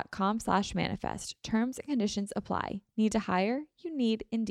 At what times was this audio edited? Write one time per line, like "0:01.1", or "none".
none